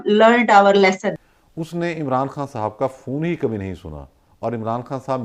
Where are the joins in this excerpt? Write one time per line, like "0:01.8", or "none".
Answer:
0:01.1

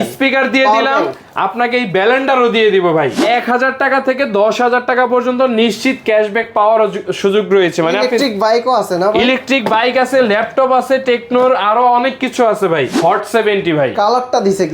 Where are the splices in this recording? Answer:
0:03.2
0:12.9

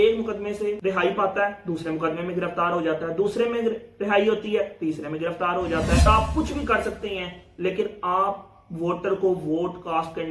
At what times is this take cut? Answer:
0:06.1

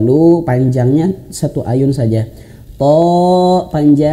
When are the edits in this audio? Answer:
none

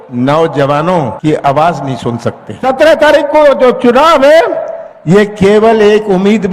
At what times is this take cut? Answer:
0:01.2
0:02.5

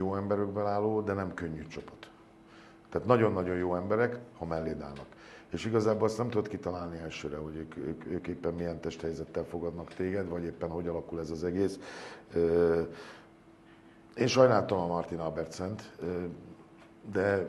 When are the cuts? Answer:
none

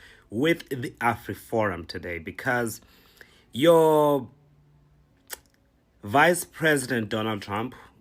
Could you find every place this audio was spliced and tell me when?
none

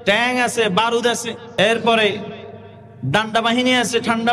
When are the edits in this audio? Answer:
0:01.4

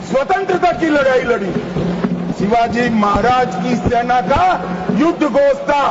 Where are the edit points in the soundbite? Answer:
0:02.3

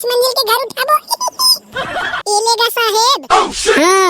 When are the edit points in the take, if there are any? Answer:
0:01.6

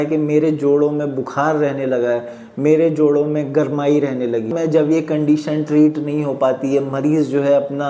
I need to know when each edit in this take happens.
0:04.5

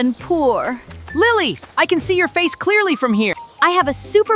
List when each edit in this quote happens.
0:01.0
0:03.5

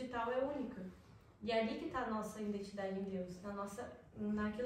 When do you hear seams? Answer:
none

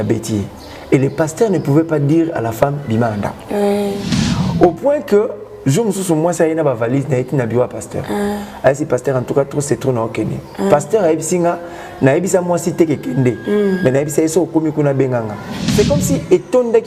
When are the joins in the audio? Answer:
0:15.6

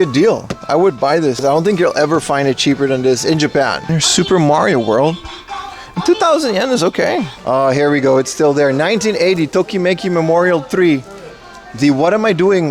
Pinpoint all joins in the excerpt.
0:01.4
0:03.9
0:07.3

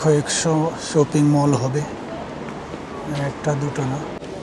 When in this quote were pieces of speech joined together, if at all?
none

